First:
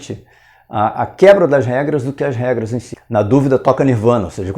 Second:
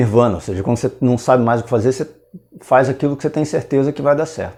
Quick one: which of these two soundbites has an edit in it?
first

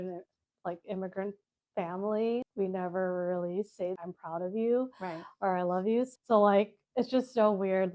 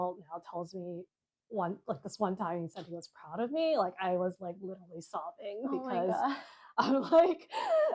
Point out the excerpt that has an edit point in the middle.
first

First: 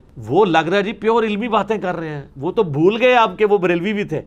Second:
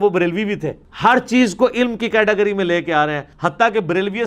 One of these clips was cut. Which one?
second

